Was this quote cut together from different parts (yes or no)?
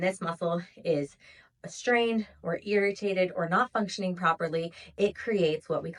no